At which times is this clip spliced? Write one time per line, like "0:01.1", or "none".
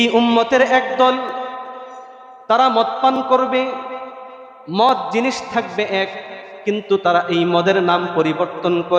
none